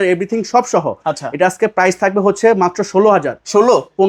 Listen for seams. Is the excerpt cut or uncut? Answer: uncut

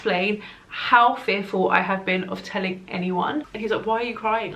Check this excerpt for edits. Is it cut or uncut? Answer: cut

